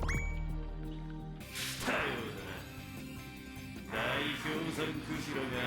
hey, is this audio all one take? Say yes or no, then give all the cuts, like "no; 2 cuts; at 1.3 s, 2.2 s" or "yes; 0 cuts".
no; 1 cut; at 1.4 s